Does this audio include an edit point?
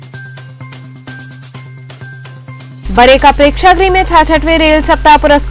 no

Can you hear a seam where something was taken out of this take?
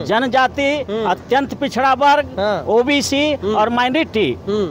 no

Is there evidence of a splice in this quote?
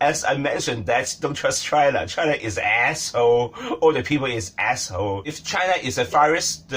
yes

